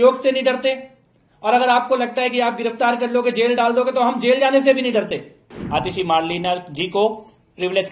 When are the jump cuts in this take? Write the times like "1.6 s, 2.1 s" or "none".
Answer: 5.5 s

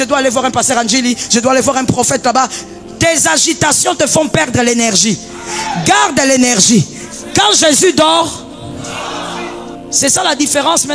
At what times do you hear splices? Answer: 9.5 s

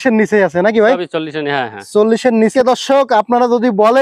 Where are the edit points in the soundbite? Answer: 2.5 s

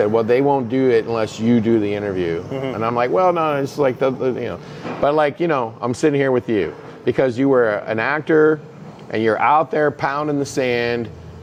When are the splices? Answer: none

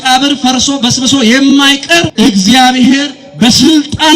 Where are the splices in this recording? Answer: 2.1 s

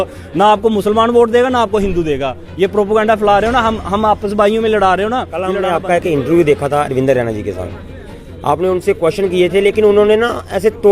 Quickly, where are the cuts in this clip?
5.5 s

